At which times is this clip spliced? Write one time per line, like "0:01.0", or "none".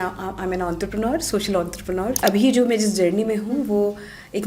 0:02.2